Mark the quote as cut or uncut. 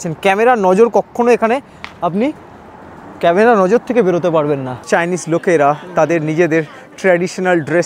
cut